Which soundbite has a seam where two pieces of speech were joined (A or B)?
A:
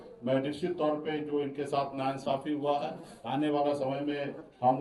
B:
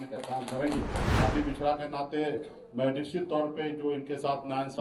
B